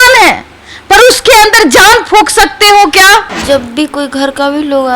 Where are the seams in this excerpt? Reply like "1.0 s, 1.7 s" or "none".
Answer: 3.2 s